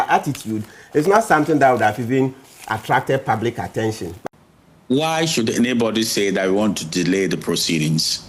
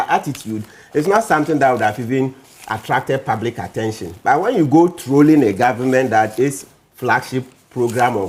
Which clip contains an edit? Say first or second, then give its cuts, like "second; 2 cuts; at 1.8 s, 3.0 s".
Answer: first; 1 cut; at 4.1 s